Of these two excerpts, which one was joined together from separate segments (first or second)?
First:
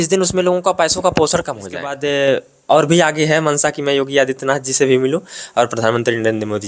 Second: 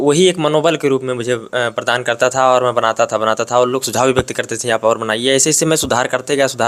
first